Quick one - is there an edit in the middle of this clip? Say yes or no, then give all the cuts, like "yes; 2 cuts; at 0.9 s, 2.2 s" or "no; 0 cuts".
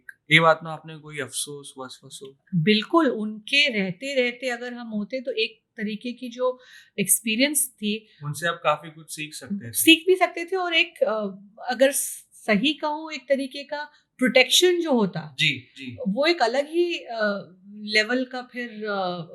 no; 0 cuts